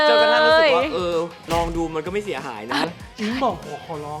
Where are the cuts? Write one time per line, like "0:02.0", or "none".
0:01.4
0:02.8